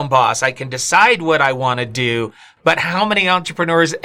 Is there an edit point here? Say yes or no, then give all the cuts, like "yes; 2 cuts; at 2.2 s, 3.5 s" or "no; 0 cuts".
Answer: no; 0 cuts